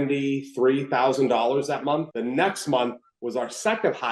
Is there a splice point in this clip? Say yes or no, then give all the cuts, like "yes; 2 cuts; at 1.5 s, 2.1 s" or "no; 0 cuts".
no; 0 cuts